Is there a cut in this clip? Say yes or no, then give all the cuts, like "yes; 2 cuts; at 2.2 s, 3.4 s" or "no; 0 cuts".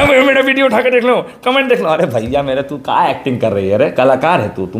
no; 0 cuts